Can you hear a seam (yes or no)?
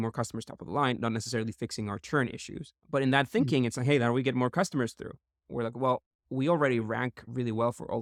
no